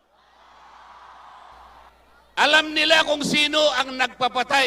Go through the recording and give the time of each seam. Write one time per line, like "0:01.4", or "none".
0:01.9